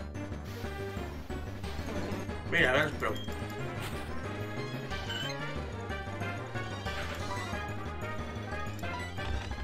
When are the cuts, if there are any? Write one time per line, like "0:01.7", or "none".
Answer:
none

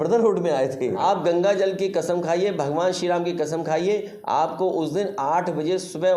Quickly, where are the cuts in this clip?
0:01.0

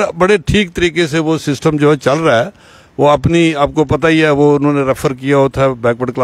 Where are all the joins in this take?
none

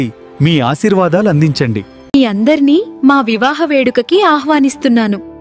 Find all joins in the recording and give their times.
0:02.0

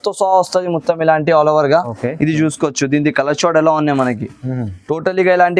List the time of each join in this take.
none

